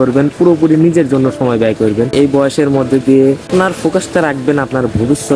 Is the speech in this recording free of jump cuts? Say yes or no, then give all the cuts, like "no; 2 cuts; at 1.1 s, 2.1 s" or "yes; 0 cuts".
yes; 0 cuts